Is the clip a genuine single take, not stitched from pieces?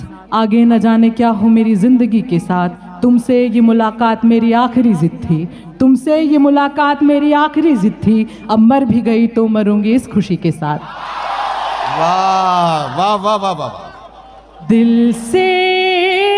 no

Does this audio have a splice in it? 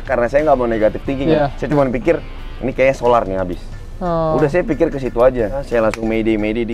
yes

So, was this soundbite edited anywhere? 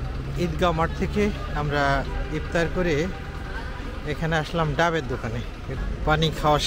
yes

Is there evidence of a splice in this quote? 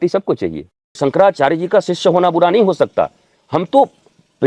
yes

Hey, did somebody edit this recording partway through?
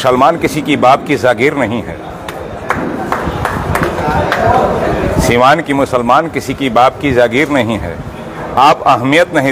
no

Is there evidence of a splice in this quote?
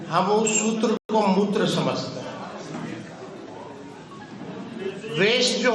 yes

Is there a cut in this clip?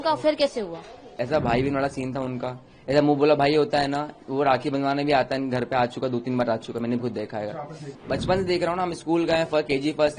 yes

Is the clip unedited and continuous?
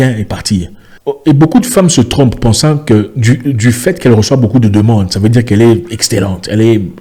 yes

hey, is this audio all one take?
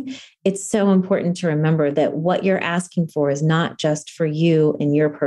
no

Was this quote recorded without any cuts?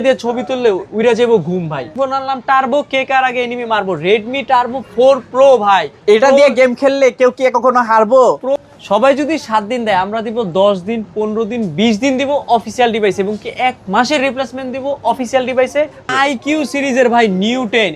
no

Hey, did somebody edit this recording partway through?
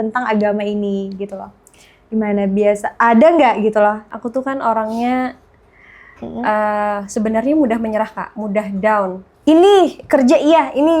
yes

